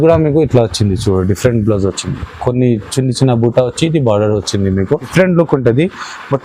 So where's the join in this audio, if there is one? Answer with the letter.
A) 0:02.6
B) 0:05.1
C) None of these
B